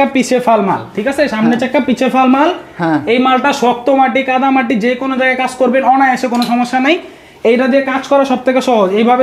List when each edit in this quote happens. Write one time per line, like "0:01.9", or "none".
none